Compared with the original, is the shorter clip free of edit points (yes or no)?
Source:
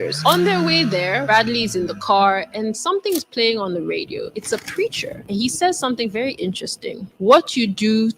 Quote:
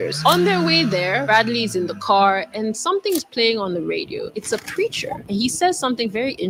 yes